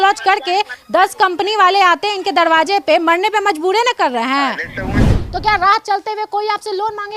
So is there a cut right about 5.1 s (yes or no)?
yes